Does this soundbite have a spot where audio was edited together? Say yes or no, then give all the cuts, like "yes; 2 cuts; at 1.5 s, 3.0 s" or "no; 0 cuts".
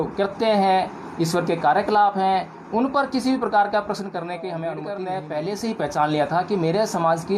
yes; 1 cut; at 4.9 s